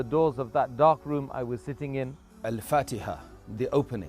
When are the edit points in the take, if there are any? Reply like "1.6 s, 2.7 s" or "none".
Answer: 2.4 s